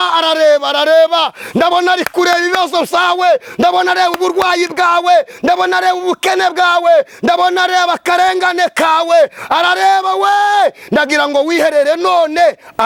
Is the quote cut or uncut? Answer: uncut